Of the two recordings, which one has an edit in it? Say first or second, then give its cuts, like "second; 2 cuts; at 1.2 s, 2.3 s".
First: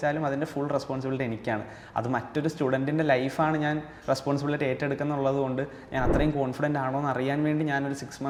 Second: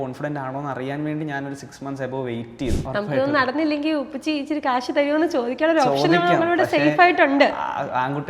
second; 1 cut; at 2.8 s